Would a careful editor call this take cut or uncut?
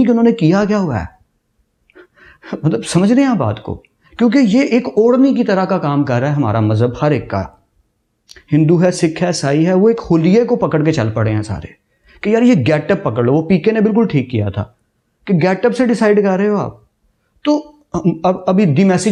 uncut